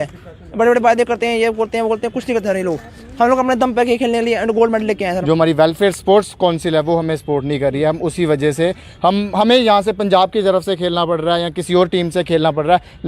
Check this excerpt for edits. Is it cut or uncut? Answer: cut